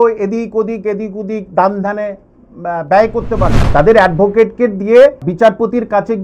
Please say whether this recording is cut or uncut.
cut